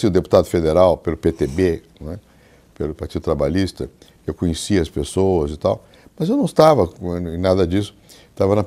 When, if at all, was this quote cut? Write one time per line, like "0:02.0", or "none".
0:01.8